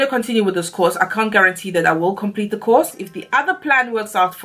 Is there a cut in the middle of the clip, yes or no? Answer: yes